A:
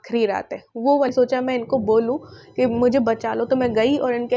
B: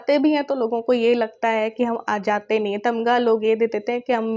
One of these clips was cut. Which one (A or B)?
A